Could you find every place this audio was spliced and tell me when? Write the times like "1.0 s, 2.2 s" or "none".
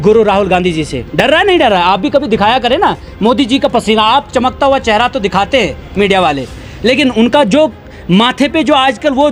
none